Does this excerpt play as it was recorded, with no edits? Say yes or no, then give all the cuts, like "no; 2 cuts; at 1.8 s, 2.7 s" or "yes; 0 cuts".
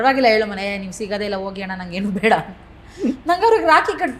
yes; 0 cuts